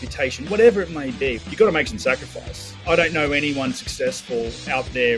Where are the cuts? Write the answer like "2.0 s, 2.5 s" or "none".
1.3 s

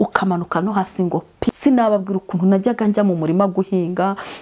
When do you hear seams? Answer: 1.5 s

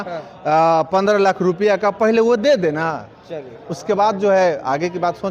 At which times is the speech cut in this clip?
none

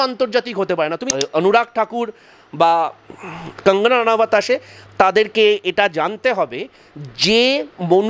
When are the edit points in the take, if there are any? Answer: 1.0 s

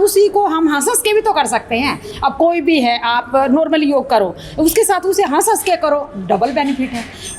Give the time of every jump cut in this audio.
none

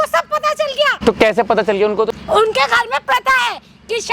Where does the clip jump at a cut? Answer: 0.9 s, 2.1 s

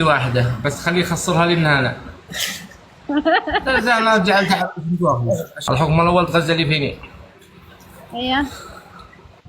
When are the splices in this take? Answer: 5.5 s

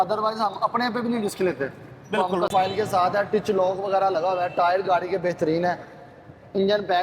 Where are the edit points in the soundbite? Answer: 2.5 s

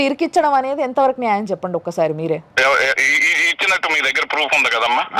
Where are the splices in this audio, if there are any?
2.5 s

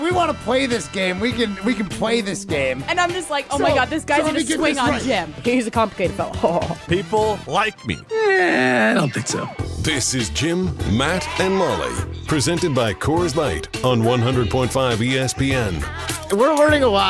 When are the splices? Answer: 16.1 s

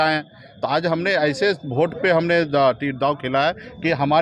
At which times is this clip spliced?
none

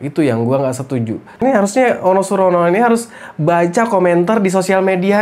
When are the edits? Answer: 1.3 s

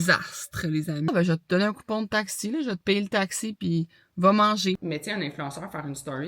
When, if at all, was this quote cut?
1.1 s, 4.8 s

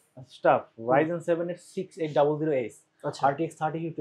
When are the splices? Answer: none

